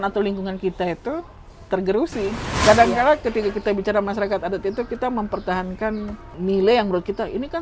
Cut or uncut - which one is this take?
cut